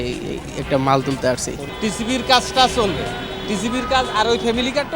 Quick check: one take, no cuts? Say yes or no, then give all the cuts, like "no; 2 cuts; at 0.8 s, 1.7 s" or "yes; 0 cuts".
no; 1 cut; at 1.6 s